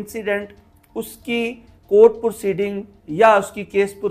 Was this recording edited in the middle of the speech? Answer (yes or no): no